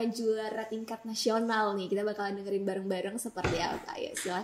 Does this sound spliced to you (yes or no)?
no